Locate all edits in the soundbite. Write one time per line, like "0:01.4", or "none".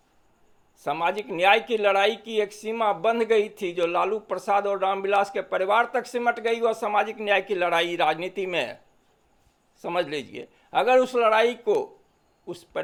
none